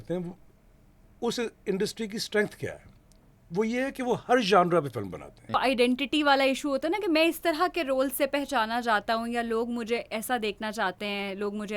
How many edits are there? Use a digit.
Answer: 1